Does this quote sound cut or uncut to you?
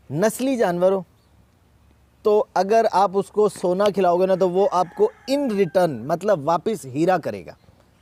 uncut